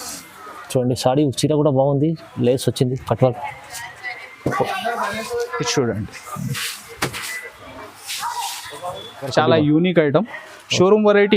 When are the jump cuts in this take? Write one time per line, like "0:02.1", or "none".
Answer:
0:09.3